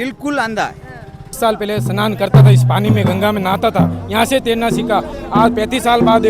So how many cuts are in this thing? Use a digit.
1